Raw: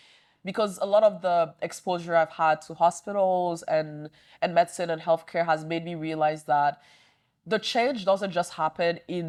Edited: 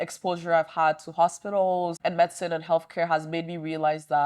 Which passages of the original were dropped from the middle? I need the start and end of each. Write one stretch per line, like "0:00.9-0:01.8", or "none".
0:03.6-0:04.3